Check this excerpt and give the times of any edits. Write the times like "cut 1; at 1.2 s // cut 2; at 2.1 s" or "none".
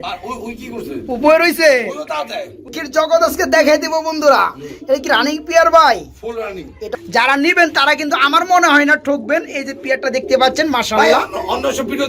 cut 1; at 2.7 s // cut 2; at 6.8 s